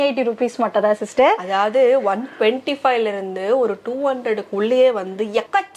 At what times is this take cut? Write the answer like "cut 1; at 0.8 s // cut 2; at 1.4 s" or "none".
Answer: none